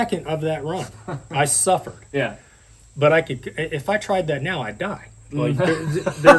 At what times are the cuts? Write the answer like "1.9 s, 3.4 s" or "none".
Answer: none